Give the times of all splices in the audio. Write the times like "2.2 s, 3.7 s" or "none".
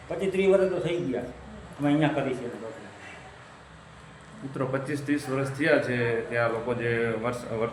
none